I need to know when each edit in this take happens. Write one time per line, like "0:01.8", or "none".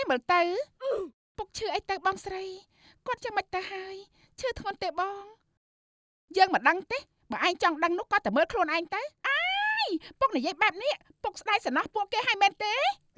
0:09.2